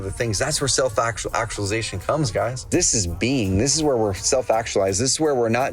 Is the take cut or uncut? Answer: cut